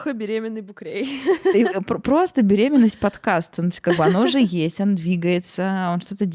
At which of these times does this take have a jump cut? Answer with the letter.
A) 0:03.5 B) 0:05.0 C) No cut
C